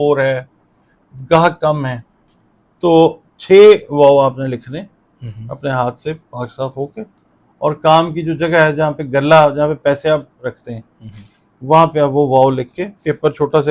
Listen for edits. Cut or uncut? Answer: uncut